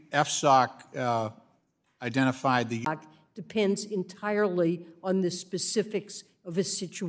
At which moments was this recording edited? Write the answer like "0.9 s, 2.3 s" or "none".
none